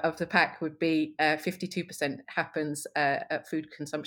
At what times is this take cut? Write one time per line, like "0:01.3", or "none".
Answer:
0:02.2